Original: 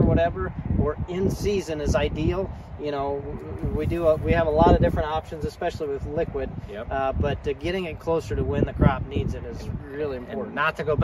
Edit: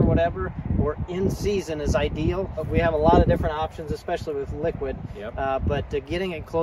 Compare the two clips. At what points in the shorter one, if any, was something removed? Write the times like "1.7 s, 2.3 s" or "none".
2.7 s

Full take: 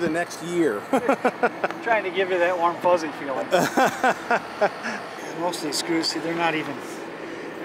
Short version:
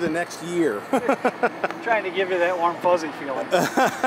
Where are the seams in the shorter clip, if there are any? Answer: none

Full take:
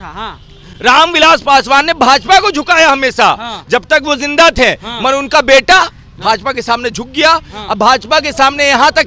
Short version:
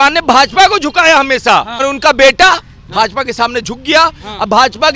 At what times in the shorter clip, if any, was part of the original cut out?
1.8 s

